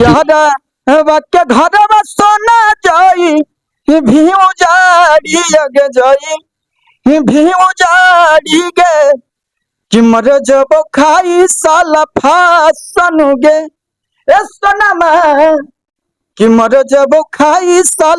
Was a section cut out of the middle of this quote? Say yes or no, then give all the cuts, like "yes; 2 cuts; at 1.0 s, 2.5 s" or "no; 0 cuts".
no; 0 cuts